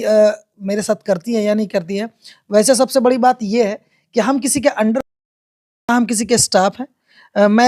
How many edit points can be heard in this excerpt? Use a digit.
0